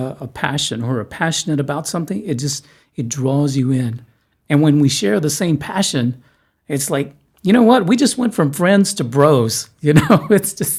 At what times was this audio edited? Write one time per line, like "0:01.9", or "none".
none